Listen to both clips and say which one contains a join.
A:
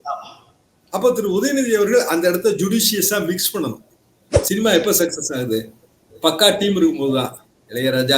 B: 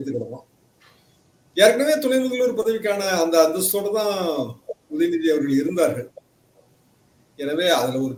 A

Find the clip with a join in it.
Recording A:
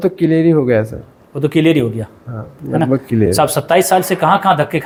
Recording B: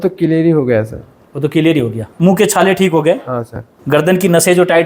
B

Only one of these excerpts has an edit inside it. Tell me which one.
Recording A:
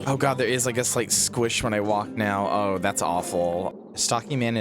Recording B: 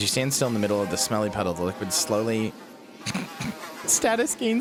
A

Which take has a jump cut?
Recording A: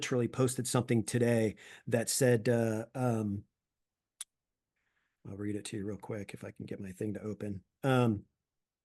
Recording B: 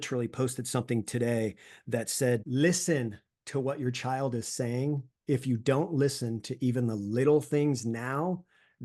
B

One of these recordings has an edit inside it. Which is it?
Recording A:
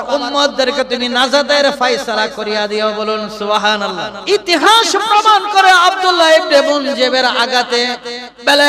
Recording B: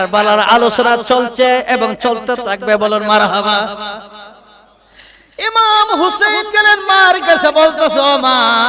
A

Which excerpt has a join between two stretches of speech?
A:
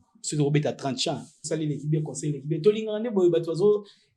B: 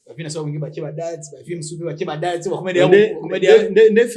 A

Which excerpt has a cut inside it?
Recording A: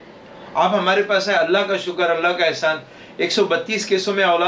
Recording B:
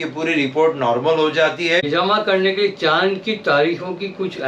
B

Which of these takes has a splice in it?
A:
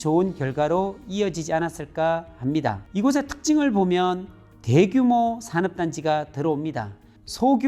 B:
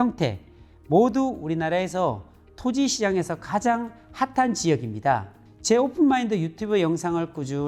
A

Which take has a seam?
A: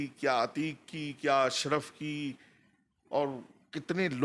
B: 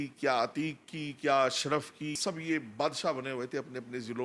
B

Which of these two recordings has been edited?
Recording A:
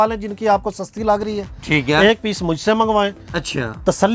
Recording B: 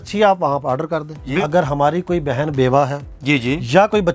B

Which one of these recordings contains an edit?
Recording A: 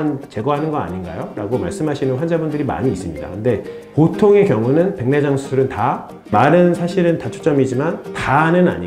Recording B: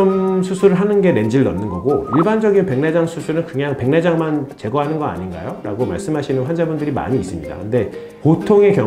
A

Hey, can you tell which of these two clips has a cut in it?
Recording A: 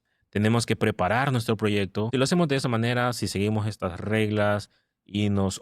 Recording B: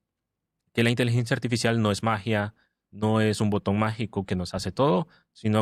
A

